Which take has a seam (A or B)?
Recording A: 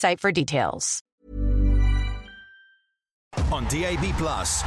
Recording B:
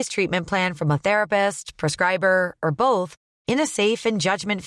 A